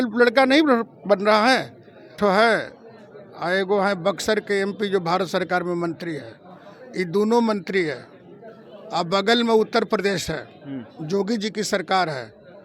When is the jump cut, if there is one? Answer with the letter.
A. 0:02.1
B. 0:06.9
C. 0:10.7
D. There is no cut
A